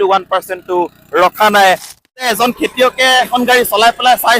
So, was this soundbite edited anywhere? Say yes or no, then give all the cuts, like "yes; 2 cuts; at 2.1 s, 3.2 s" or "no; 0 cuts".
yes; 2 cuts; at 2.1 s, 3.3 s